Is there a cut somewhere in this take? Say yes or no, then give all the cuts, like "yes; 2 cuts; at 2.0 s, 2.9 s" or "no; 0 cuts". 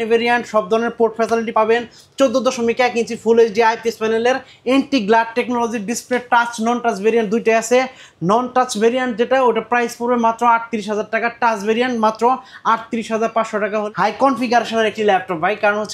yes; 2 cuts; at 1.5 s, 13.8 s